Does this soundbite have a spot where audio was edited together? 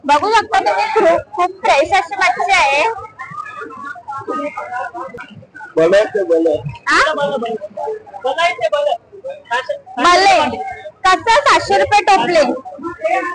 yes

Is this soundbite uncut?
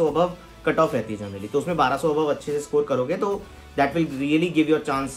yes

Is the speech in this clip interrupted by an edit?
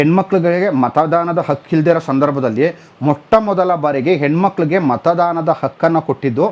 no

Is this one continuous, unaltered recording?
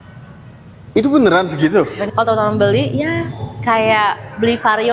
no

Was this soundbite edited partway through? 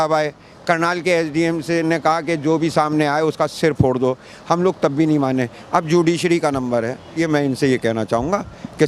yes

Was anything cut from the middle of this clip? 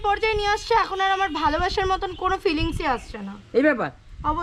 no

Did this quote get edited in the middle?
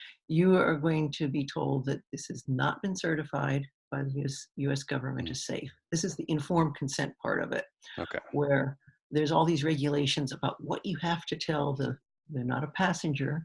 no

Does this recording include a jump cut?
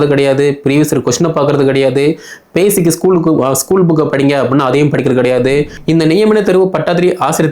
yes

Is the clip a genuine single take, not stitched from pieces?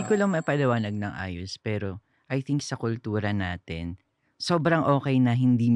yes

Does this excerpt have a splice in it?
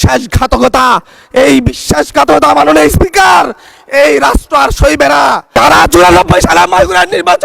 yes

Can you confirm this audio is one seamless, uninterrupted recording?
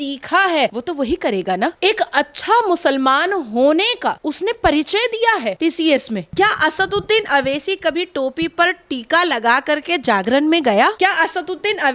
no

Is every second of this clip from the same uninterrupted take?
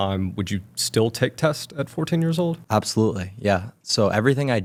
yes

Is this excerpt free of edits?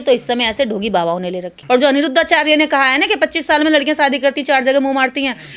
no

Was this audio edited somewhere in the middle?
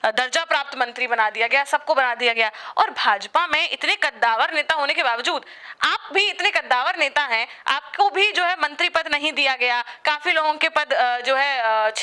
no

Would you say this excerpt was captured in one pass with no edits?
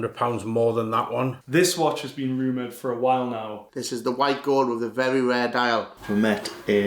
no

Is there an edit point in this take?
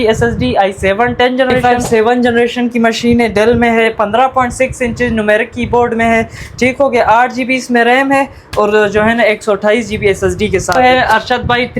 yes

